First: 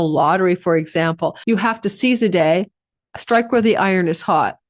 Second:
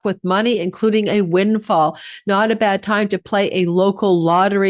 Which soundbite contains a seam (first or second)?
first